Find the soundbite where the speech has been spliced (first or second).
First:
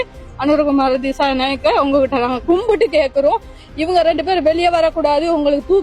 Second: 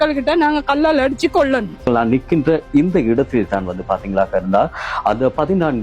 second